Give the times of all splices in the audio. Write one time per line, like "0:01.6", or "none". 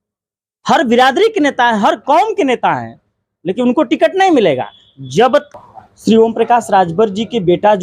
0:05.5